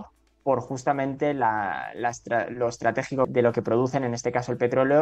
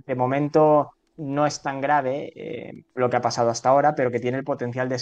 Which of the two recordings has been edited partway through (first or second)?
first